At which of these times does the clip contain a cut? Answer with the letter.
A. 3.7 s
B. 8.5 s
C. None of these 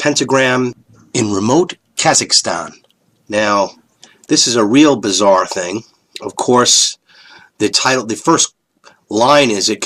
A